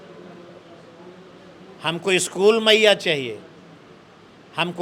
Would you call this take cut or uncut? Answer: uncut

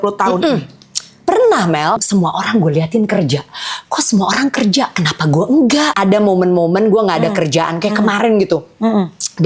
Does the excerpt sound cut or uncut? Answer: cut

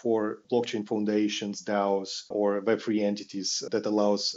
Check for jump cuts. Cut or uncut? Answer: uncut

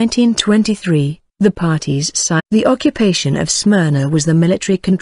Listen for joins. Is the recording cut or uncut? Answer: uncut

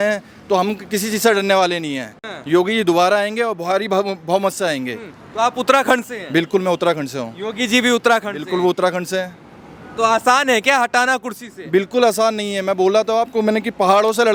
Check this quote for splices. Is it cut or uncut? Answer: uncut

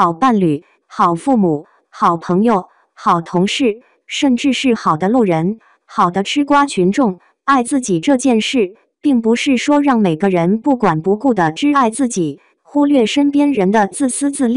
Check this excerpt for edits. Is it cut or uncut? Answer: cut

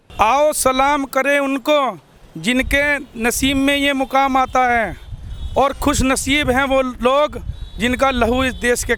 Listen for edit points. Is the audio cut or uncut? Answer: uncut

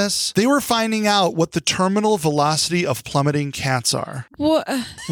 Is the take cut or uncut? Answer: uncut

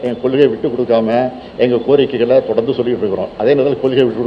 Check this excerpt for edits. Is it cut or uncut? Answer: uncut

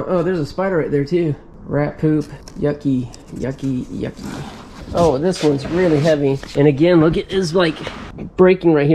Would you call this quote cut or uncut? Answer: cut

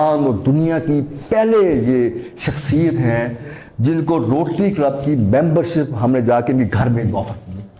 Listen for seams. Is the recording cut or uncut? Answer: uncut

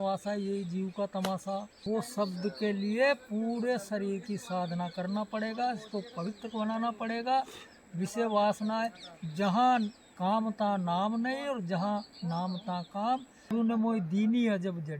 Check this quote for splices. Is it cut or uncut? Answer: cut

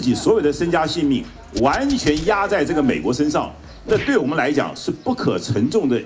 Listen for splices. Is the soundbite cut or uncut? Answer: uncut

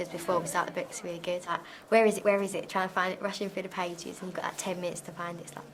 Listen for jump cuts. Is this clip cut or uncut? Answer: uncut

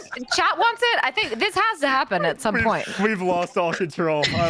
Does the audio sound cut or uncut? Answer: uncut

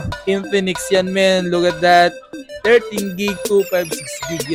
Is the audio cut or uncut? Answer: uncut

